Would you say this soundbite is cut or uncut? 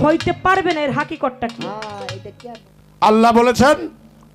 cut